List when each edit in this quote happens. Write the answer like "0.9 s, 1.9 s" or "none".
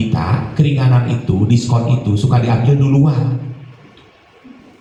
none